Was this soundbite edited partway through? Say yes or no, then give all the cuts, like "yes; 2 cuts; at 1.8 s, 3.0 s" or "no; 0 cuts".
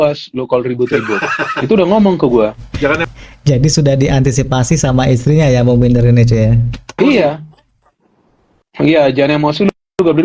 no; 0 cuts